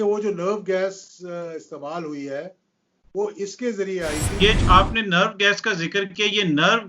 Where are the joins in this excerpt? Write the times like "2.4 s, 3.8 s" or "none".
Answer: 4.4 s